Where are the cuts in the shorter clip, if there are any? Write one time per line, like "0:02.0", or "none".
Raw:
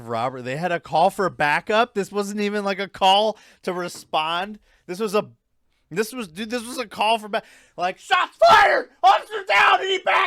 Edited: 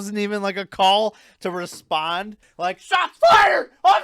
0:02.4